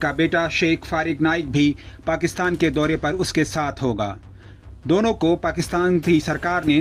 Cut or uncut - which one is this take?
uncut